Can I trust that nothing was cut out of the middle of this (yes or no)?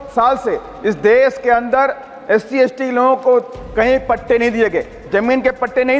yes